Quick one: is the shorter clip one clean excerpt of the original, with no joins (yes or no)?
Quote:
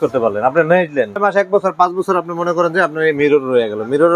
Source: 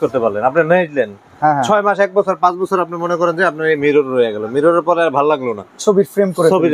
no